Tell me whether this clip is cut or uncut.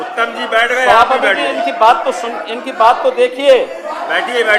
uncut